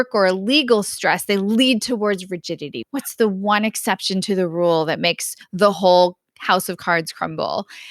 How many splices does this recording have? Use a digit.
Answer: 1